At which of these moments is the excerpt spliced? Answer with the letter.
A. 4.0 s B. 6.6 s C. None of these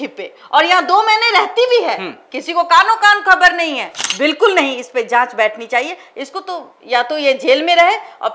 A